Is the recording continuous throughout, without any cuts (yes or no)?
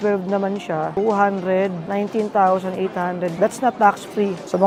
yes